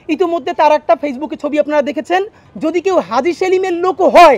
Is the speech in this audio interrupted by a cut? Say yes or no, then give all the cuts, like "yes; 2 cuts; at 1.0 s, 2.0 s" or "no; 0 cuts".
yes; 1 cut; at 2.4 s